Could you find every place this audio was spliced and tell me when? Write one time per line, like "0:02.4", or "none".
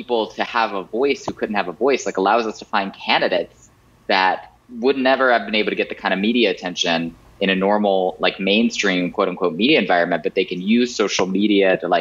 none

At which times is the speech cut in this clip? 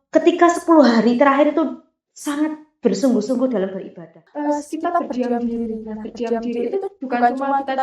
0:04.2

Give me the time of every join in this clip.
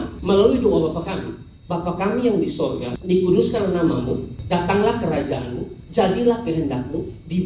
0:02.9
0:04.3

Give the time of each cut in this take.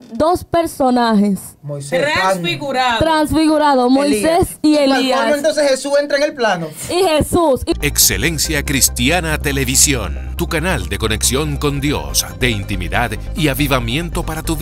0:07.7

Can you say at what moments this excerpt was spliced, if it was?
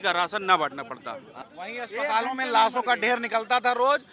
0:01.3

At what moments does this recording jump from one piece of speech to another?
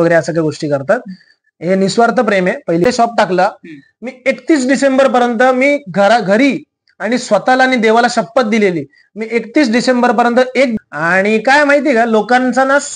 0:02.8
0:10.7

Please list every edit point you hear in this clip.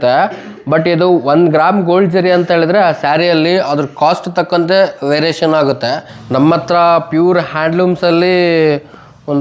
0:06.2

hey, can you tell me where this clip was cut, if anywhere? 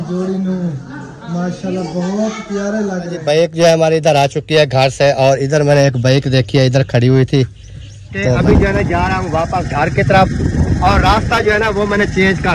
0:03.1
0:08.3

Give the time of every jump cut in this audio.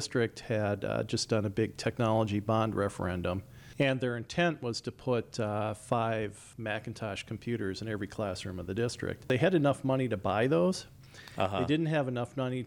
0:09.2

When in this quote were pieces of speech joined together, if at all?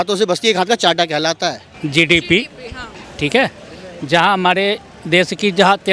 0:01.7

